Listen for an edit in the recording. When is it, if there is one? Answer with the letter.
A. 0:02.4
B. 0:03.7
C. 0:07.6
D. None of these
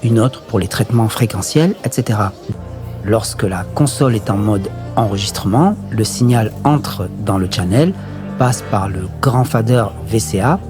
A